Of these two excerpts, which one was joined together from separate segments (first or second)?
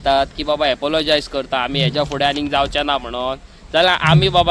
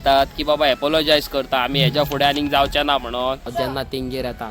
second